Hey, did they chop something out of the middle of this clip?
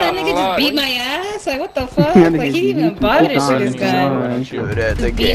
no; 0 cuts

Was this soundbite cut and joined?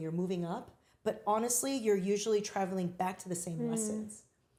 no; 0 cuts

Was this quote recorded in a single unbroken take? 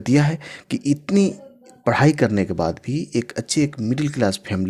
yes; 0 cuts

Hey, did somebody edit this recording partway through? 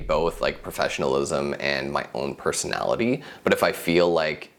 no; 0 cuts

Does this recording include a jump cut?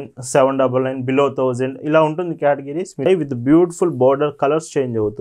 yes; 1 cut; at 3.0 s

